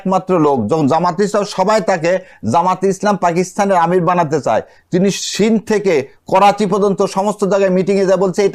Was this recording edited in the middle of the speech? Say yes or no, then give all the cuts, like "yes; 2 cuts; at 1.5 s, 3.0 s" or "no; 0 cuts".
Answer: no; 0 cuts